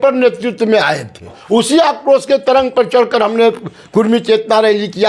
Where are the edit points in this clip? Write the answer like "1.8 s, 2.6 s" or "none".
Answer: 1.4 s